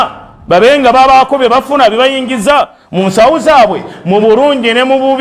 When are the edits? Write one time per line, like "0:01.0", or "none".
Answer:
none